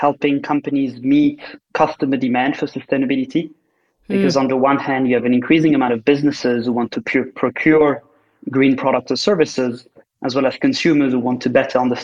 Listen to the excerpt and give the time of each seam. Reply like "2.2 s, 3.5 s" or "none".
none